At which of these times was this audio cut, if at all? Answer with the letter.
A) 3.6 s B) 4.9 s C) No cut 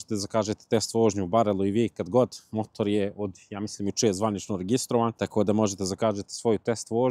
C